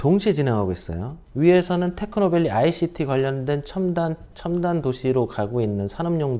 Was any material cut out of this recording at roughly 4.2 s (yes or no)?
no